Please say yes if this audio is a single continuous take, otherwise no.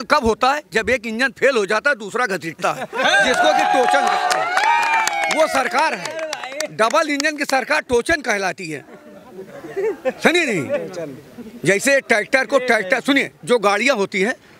yes